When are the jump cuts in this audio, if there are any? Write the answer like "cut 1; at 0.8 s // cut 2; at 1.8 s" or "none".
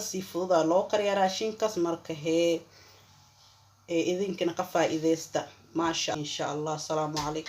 cut 1; at 6.1 s